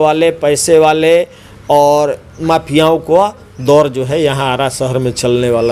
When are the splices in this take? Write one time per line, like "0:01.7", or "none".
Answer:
none